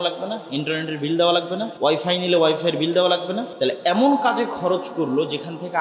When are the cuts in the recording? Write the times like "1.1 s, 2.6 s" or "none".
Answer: 1.7 s, 3.5 s